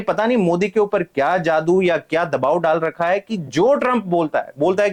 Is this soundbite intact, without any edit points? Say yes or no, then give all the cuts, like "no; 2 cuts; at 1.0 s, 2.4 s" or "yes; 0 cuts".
yes; 0 cuts